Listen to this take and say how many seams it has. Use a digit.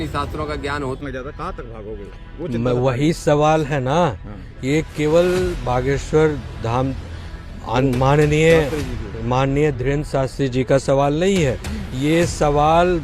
1